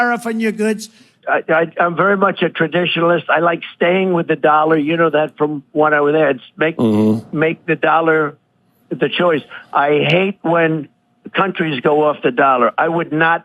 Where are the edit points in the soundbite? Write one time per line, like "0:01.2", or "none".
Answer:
0:01.1